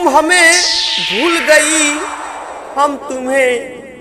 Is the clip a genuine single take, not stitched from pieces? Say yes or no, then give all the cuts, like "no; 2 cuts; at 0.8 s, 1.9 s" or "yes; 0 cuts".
yes; 0 cuts